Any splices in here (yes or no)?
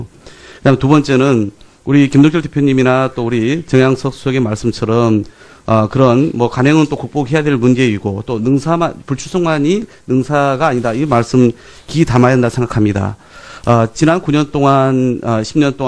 yes